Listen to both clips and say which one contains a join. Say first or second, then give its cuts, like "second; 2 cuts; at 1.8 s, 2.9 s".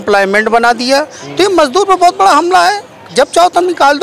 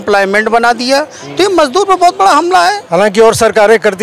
second; 1 cut; at 2.8 s